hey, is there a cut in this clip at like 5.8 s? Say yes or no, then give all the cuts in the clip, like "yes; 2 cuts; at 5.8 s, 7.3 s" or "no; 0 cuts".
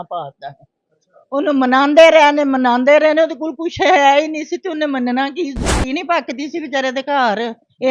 yes; 1 cut; at 5.8 s